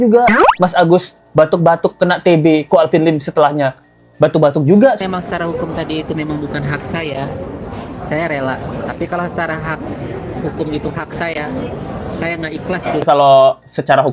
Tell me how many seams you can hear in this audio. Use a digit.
2